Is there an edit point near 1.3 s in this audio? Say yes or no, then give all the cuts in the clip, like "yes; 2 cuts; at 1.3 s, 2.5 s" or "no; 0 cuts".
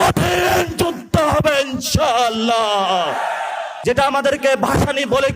no; 1 cut; at 3.7 s